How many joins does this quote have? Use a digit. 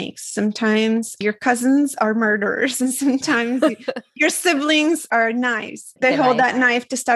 1